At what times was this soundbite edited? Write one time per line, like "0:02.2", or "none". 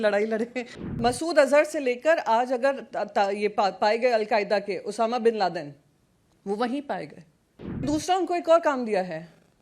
0:00.9
0:07.8